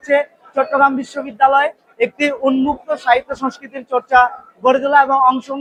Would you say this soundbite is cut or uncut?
uncut